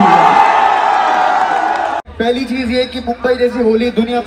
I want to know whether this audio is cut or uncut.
cut